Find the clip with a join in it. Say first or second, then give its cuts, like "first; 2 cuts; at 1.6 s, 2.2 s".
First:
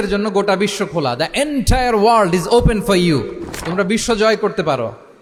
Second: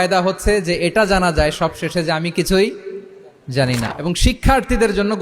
second; 1 cut; at 3.9 s